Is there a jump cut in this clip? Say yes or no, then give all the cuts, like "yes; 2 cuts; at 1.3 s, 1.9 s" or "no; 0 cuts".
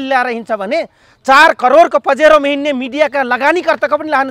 no; 0 cuts